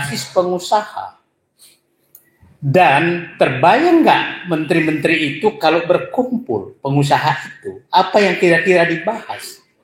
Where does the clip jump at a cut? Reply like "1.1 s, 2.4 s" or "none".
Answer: 3.3 s